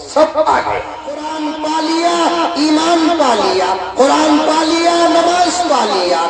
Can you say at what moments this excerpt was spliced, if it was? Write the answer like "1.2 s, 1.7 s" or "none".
1.3 s